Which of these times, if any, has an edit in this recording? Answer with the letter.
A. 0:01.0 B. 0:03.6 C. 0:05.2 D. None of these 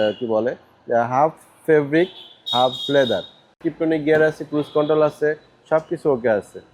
B